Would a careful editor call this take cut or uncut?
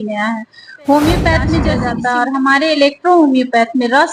cut